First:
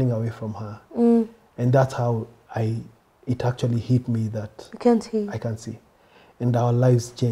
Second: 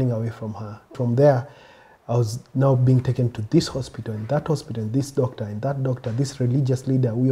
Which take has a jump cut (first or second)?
second